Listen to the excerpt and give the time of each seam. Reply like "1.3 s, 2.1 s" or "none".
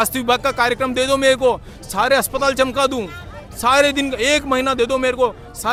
none